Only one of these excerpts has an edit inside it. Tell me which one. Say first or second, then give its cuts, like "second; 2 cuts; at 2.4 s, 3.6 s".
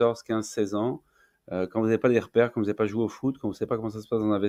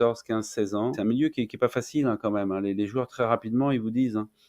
second; 1 cut; at 1.0 s